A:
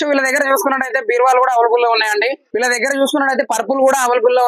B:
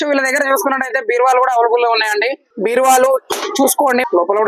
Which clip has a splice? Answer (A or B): A